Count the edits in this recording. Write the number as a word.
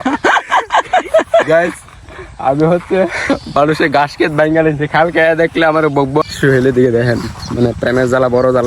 four